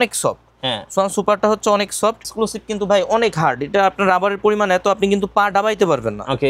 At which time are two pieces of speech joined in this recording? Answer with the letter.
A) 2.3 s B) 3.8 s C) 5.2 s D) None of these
A